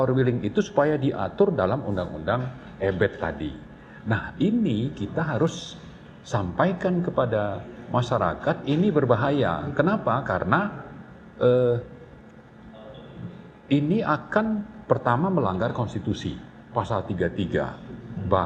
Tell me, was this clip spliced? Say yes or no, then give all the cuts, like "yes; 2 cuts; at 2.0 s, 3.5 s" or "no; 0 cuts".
no; 0 cuts